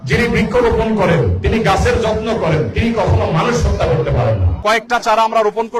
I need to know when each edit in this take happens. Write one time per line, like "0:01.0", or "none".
0:04.5